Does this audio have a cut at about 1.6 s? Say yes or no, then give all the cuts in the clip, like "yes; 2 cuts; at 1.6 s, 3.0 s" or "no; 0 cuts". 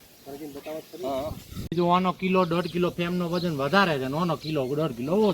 yes; 1 cut; at 1.6 s